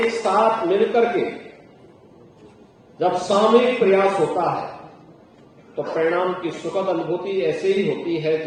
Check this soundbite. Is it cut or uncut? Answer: uncut